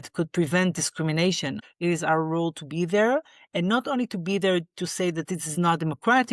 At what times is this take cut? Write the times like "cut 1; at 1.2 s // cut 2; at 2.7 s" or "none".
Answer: cut 1; at 1.6 s

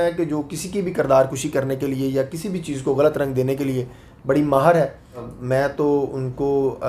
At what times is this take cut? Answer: cut 1; at 5.3 s

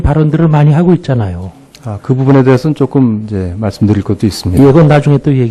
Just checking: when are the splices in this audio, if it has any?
cut 1; at 2.6 s

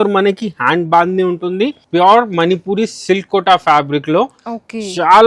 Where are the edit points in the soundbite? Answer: cut 1; at 1.8 s

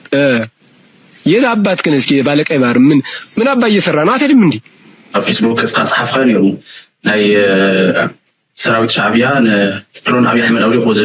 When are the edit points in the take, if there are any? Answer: cut 1; at 5.1 s

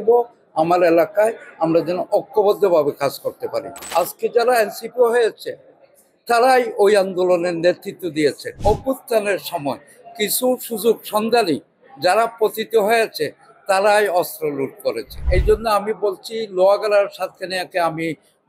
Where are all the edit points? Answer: cut 1; at 3.7 s // cut 2; at 8.5 s // cut 3; at 15.2 s

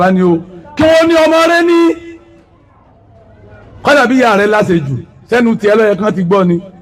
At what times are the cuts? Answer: none

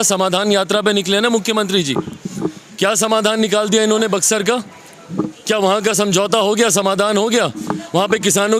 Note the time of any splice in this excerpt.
none

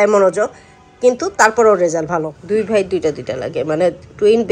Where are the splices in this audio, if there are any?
cut 1; at 2.4 s

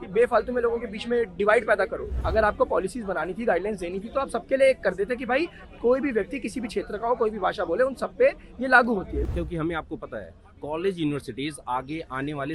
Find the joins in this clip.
cut 1; at 2.2 s // cut 2; at 9.2 s

